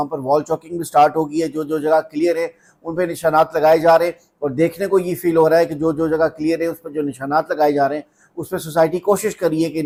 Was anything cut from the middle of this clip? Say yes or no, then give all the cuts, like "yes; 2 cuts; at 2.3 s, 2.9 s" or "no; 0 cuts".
no; 0 cuts